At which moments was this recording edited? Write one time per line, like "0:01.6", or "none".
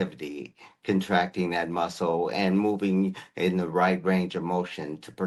none